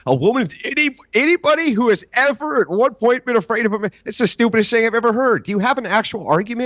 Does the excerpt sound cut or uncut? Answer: uncut